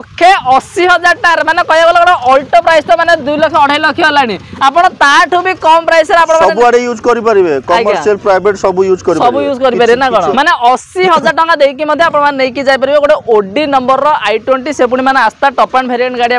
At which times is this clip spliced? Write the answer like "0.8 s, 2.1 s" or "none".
10.3 s